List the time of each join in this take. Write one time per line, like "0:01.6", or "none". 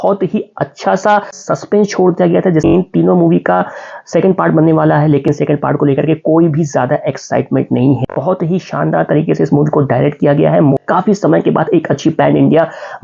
0:02.7
0:08.0
0:10.8